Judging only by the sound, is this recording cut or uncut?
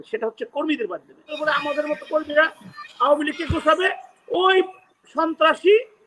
cut